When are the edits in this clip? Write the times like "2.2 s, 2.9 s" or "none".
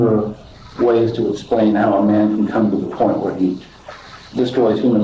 none